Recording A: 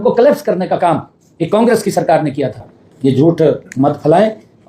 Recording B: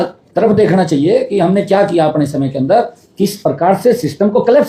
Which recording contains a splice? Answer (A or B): A